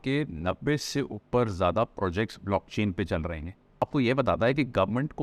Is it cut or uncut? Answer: cut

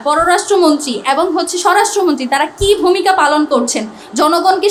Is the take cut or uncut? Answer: uncut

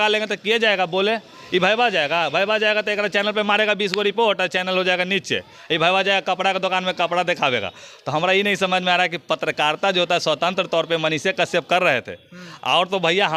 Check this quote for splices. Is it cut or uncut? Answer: uncut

